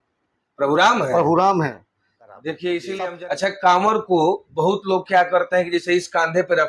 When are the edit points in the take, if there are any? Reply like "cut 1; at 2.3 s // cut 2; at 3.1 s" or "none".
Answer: cut 1; at 3.1 s